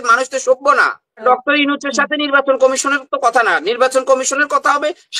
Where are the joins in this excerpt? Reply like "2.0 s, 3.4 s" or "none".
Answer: 1.2 s